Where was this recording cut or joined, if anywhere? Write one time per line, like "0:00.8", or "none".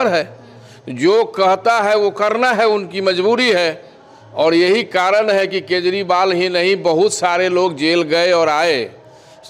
none